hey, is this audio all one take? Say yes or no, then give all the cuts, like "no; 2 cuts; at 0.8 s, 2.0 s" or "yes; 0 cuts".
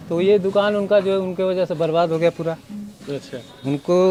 yes; 0 cuts